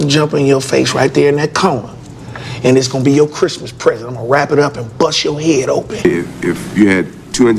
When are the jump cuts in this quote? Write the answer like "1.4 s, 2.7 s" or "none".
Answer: 5.9 s